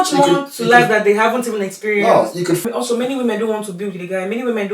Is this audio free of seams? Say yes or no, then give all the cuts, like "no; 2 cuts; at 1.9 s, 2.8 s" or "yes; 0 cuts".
no; 1 cut; at 2.6 s